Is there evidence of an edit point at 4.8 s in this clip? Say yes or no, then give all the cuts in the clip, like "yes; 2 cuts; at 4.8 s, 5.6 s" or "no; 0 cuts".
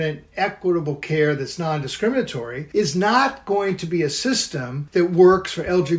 yes; 1 cut; at 4.8 s